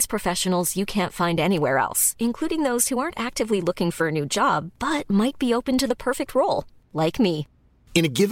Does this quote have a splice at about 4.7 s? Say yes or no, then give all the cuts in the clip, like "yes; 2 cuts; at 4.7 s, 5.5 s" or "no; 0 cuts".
no; 0 cuts